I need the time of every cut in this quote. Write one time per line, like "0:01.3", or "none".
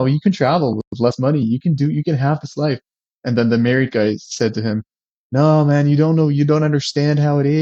none

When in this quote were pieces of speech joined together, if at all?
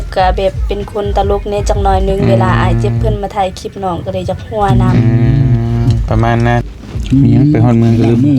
0:06.7

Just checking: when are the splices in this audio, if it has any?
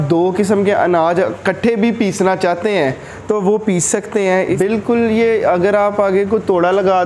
0:04.5

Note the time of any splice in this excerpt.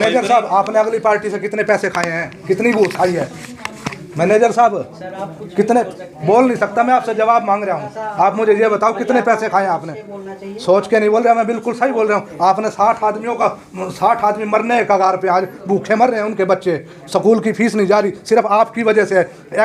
none

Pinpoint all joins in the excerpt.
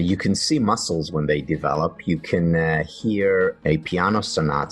0:03.6

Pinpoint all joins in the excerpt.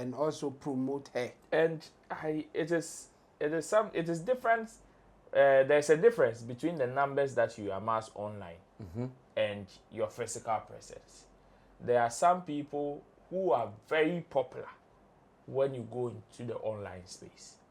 0:01.4

